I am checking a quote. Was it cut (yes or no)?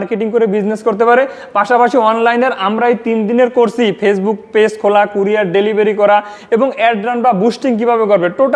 no